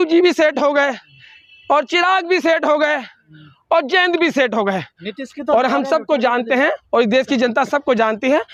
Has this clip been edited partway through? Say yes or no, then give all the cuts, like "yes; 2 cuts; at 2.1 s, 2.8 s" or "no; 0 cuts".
no; 0 cuts